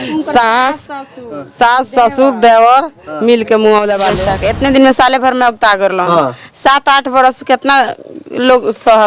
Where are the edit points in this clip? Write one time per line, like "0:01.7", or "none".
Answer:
0:04.2